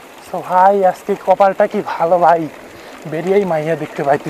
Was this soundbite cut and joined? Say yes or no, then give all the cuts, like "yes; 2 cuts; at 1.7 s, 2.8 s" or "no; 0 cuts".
no; 0 cuts